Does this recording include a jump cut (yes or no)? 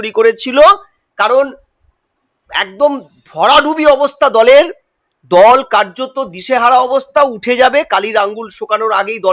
no